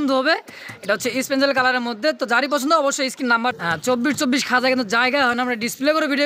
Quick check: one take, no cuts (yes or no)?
no